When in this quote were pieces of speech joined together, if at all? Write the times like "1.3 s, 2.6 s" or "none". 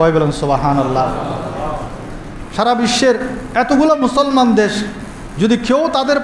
2.0 s